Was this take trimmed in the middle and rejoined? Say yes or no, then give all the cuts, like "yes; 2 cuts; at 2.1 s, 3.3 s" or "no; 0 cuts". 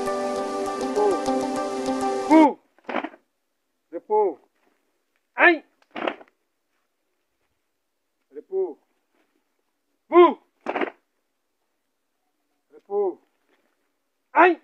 yes; 1 cut; at 2.3 s